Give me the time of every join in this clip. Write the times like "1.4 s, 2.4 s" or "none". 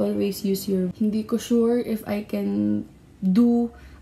0.9 s